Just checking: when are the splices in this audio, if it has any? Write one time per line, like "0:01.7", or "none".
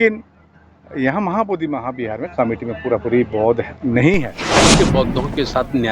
0:04.6